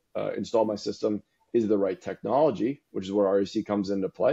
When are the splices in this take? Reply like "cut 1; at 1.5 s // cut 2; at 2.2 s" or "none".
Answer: none